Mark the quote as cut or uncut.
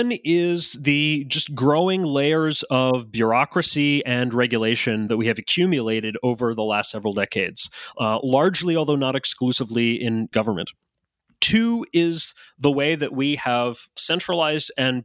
cut